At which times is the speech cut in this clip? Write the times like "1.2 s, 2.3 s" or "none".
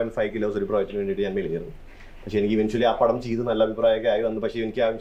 none